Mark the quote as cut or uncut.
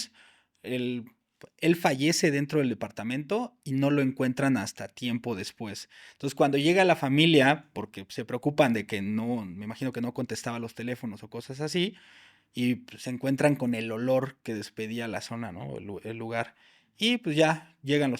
uncut